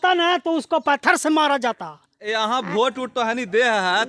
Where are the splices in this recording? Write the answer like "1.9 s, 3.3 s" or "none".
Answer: 2.2 s